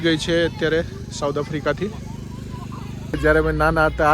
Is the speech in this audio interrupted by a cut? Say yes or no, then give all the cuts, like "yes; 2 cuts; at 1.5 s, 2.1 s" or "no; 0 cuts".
yes; 1 cut; at 3.1 s